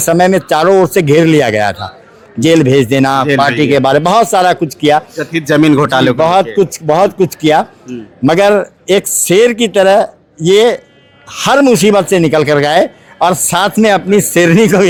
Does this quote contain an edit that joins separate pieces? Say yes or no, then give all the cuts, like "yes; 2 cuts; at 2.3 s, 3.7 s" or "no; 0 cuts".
no; 0 cuts